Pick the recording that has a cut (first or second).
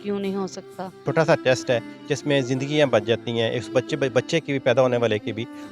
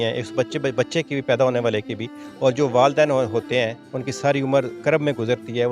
first